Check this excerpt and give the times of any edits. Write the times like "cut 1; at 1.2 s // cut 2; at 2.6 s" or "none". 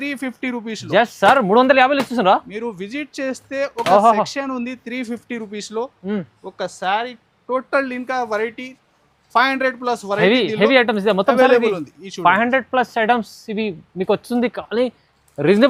none